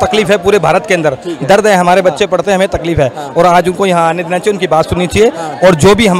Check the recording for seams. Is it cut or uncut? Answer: uncut